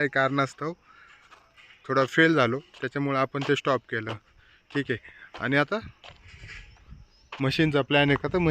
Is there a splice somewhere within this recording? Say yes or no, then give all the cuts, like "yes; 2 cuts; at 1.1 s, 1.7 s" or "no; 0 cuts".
no; 0 cuts